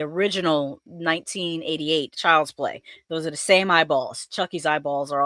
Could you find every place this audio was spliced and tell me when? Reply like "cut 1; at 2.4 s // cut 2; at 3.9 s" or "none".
cut 1; at 2.1 s